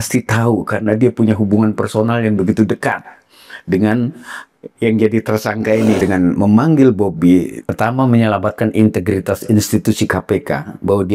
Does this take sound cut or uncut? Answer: cut